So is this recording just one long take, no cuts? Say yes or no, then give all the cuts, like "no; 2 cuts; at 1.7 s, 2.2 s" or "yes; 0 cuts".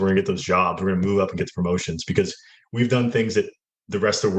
yes; 0 cuts